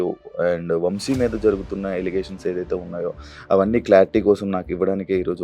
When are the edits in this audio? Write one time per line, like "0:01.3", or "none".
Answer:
none